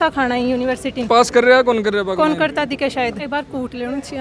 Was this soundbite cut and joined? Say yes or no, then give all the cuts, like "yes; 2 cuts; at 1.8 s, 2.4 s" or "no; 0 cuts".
yes; 2 cuts; at 1.1 s, 3.2 s